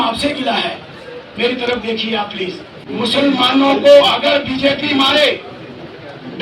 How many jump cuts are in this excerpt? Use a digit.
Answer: 1